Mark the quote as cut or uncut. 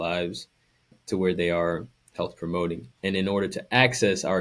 cut